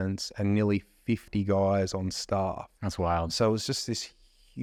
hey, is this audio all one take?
yes; 0 cuts

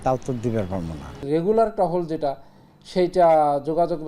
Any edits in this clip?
yes; 1 cut; at 1.2 s

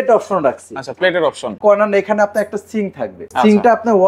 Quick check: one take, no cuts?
no; 2 cuts; at 1.6 s, 3.3 s

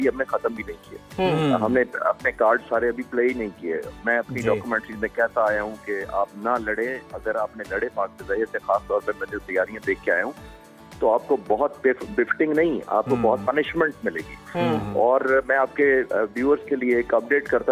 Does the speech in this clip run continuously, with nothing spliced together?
yes; 0 cuts

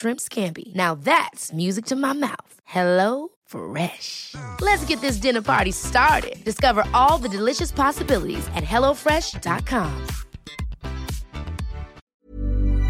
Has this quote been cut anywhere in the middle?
yes; 1 cut; at 12.0 s

